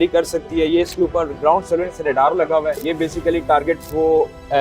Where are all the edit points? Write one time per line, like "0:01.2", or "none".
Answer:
0:02.8